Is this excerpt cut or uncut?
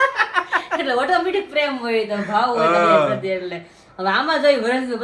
uncut